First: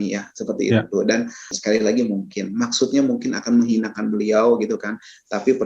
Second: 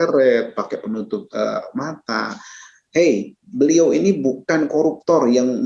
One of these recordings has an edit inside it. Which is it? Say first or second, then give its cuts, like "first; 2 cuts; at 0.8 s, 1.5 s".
first; 1 cut; at 1.6 s